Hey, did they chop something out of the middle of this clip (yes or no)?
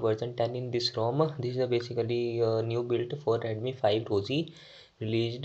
no